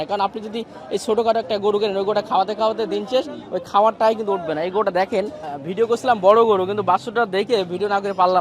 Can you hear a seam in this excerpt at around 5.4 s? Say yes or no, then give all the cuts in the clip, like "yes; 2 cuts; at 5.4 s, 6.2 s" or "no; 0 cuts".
yes; 1 cut; at 5.4 s